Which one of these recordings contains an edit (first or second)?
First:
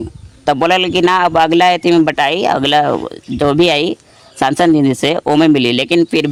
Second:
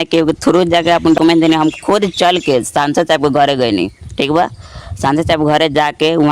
second